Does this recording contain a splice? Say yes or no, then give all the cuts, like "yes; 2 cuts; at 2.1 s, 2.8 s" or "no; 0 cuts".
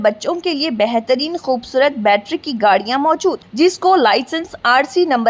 no; 0 cuts